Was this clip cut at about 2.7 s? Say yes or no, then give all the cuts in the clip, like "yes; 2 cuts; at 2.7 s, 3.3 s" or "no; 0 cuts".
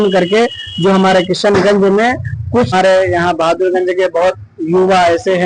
yes; 1 cut; at 2.7 s